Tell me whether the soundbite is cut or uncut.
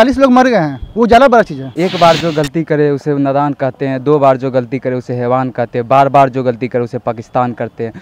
cut